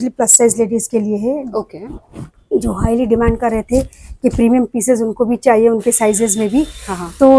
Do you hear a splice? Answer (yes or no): no